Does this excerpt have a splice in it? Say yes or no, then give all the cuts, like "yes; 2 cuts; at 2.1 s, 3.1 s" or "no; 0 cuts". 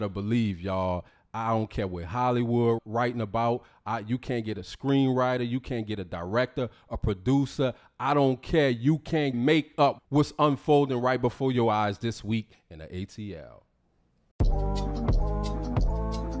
yes; 1 cut; at 14.2 s